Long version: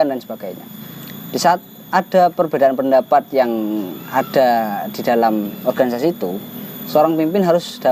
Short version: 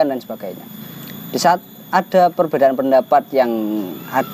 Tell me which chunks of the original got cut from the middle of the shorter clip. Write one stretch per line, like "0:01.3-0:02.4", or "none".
none